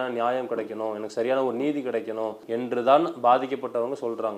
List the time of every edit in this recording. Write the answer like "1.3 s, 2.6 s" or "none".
2.4 s